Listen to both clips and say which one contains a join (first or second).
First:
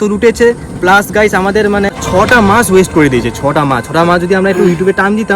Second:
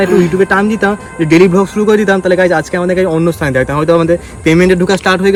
first